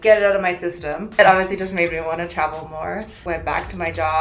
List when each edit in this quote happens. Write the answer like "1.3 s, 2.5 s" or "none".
1.1 s, 3.1 s